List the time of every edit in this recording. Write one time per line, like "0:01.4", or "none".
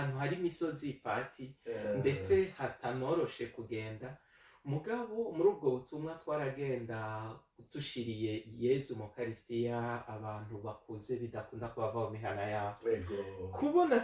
none